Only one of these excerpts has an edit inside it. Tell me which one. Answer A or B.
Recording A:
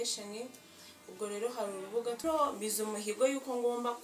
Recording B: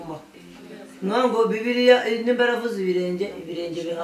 A